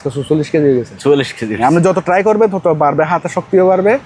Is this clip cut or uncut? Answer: uncut